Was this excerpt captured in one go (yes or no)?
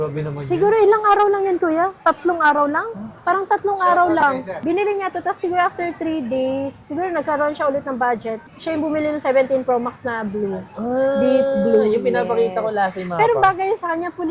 yes